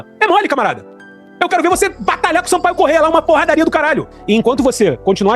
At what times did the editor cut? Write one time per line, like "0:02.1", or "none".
0:04.1

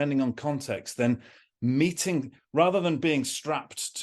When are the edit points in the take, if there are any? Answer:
none

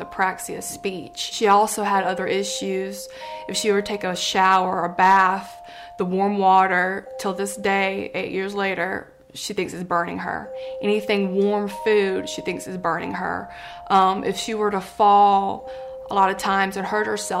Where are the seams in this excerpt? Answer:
0:01.3

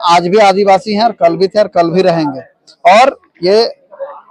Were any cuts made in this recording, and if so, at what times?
none

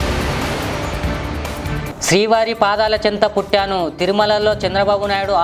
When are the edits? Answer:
0:01.8

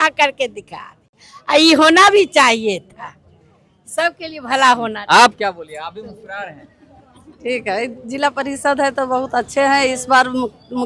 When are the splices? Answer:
none

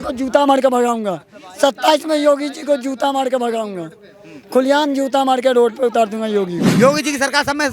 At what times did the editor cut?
0:06.6

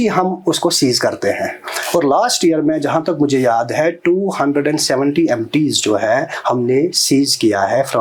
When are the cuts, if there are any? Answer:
none

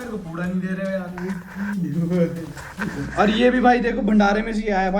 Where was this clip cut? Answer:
none

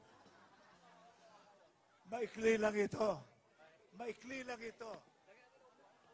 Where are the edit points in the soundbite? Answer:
none

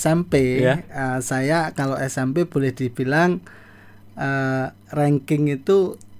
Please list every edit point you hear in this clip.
none

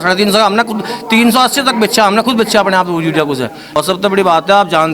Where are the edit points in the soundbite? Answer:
0:03.6

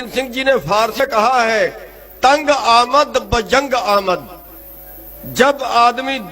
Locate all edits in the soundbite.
0:01.0

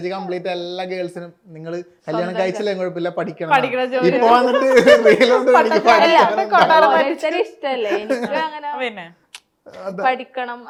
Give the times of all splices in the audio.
none

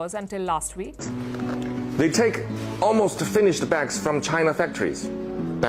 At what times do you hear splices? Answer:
0:01.2

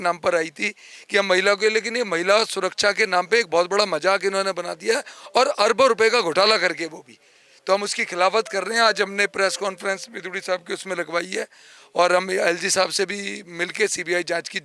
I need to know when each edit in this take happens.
none

